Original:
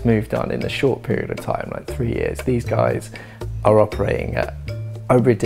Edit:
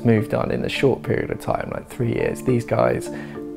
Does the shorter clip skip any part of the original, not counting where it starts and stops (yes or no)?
no